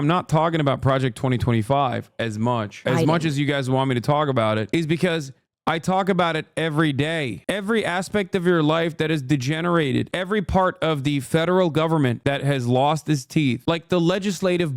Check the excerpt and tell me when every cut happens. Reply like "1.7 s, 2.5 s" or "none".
2.8 s, 7.4 s